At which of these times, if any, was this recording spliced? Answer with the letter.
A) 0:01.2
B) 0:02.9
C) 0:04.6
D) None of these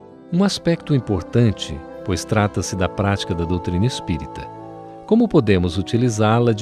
B